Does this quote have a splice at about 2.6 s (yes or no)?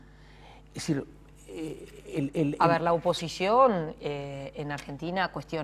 no